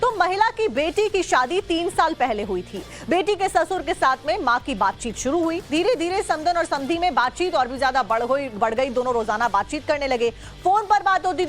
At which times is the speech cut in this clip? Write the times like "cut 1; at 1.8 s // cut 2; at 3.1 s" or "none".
none